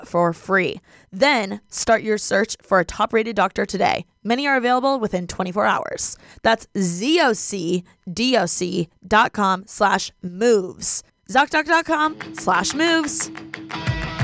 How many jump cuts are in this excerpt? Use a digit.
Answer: 1